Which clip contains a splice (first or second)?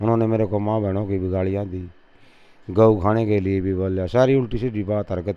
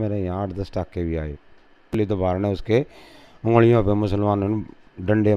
second